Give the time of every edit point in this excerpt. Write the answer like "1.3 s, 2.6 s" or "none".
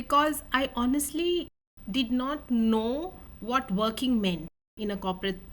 none